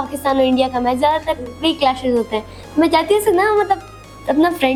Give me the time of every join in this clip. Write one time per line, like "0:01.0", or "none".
none